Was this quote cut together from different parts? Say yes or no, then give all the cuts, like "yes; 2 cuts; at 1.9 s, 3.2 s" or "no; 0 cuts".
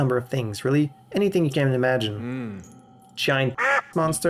no; 0 cuts